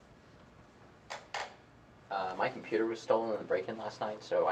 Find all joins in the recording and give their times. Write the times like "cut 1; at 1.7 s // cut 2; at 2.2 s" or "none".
none